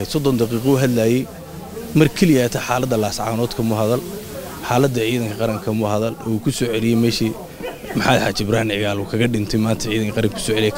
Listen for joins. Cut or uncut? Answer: uncut